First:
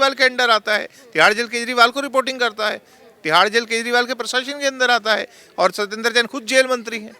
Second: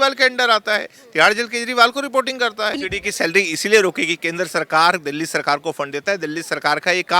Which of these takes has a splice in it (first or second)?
second